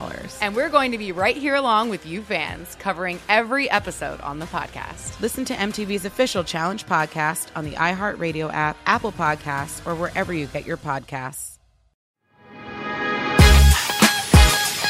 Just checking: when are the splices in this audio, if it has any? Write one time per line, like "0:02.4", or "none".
0:12.1